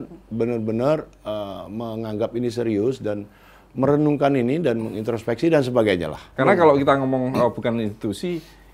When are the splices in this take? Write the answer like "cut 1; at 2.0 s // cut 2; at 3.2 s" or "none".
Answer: cut 1; at 6.3 s